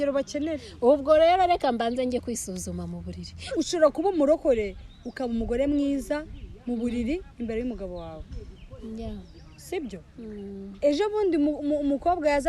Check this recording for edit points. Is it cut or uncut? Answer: cut